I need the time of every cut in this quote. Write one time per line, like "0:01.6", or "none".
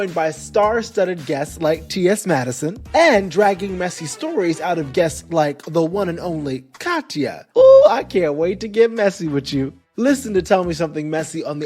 0:02.7
0:07.4